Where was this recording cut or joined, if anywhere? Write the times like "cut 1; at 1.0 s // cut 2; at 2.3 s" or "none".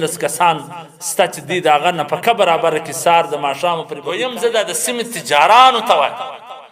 cut 1; at 4.0 s